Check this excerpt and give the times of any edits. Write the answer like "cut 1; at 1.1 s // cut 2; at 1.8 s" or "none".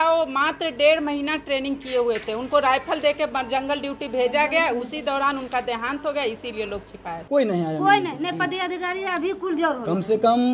cut 1; at 7.2 s